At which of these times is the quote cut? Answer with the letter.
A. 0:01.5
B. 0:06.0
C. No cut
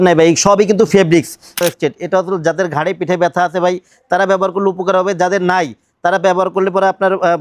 A